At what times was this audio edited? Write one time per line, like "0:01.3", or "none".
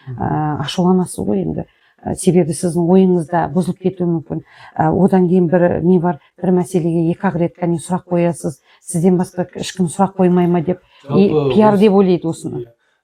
none